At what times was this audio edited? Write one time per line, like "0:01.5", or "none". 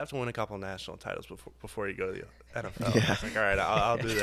none

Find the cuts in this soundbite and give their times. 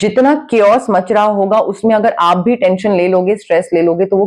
none

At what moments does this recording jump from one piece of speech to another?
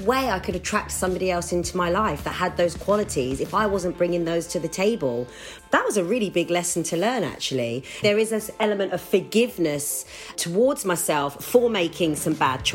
0:05.5
0:08.0
0:10.3

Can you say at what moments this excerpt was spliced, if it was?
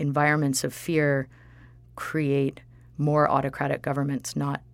none

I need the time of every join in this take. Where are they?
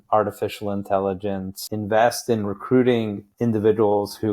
0:01.6
0:03.3

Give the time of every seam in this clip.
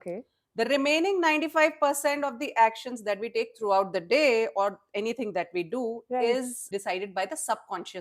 0:06.6

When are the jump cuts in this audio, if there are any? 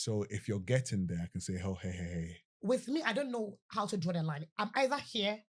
0:02.4

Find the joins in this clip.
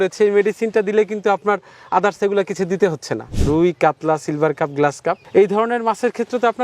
0:03.3

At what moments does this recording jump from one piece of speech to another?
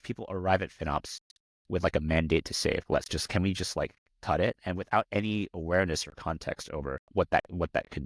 0:02.8
0:07.0

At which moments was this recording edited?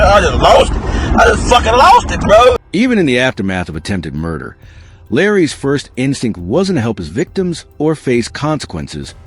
0:02.6

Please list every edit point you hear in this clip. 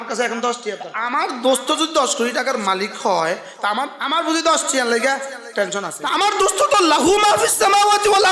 0:00.9
0:04.0
0:06.0

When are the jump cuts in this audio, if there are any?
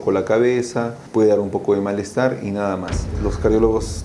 0:01.0
0:03.2

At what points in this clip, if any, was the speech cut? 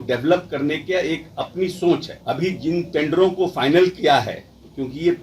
0:02.1

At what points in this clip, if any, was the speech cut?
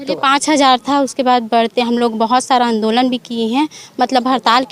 none

